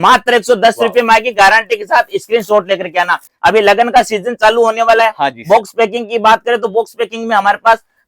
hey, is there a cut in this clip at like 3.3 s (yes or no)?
yes